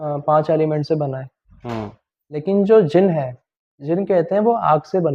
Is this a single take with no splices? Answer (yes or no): yes